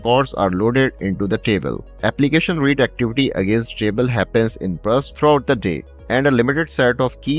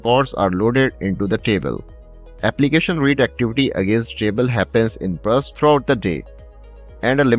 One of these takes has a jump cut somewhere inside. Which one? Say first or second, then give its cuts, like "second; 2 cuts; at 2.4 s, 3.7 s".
first; 2 cuts; at 1.8 s, 5.9 s